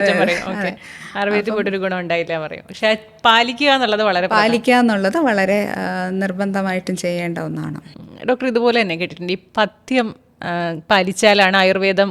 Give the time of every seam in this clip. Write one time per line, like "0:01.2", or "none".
none